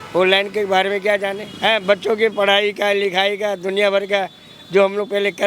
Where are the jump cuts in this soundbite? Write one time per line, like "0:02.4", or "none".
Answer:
0:01.5